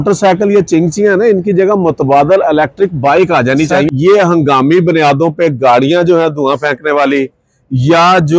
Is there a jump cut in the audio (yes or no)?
yes